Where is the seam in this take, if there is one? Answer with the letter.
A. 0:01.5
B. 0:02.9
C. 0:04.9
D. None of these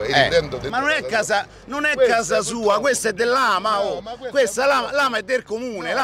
D